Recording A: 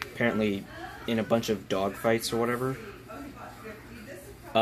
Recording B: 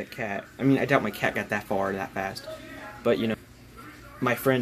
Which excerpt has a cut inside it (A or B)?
B